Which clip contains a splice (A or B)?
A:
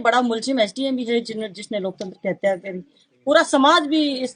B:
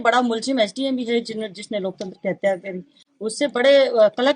A